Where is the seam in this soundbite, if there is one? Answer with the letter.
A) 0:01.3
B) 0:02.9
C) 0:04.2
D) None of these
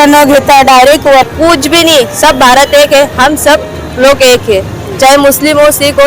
A